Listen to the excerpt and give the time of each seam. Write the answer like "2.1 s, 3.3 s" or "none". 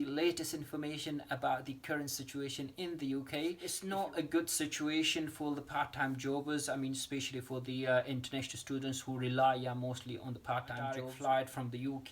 3.7 s, 11.1 s